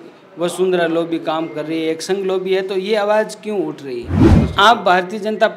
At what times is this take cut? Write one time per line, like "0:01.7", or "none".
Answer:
0:04.4